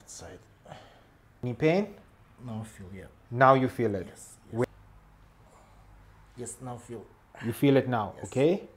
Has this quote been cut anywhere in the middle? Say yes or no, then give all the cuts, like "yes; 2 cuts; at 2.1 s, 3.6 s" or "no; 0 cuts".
yes; 2 cuts; at 1.4 s, 4.6 s